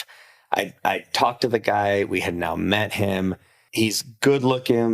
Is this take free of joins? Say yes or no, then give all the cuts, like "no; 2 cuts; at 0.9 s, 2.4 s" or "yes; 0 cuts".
no; 1 cut; at 3.6 s